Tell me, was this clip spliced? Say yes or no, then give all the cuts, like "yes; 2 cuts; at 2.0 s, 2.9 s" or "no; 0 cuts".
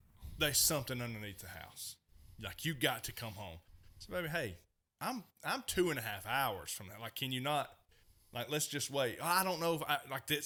no; 0 cuts